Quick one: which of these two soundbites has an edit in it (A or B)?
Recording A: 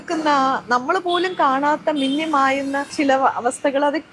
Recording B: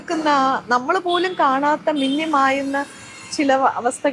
A